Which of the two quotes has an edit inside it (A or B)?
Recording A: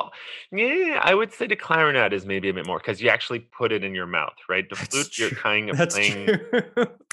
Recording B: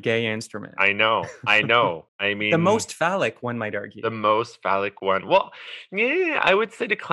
B